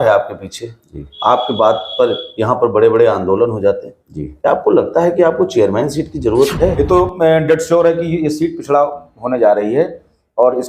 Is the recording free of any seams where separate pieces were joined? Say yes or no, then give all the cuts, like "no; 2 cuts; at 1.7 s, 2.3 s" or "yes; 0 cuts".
no; 1 cut; at 6.7 s